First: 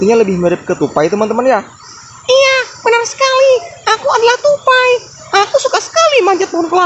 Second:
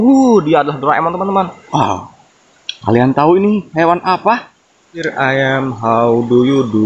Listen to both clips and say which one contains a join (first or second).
second